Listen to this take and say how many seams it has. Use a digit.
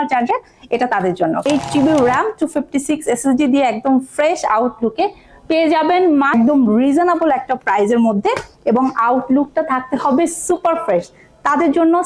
2